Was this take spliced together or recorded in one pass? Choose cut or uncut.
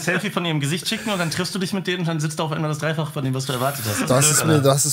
uncut